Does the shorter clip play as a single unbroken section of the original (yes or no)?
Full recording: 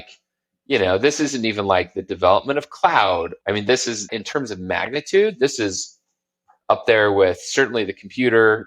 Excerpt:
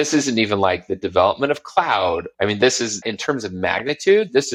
yes